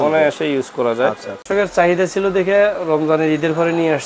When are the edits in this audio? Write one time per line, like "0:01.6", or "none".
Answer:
0:01.5